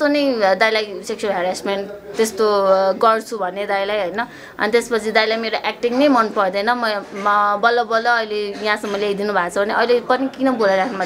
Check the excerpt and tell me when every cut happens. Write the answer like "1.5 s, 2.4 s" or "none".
none